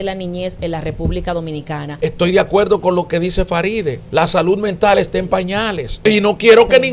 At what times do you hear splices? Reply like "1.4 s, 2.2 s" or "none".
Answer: 1.9 s, 4.0 s, 6.0 s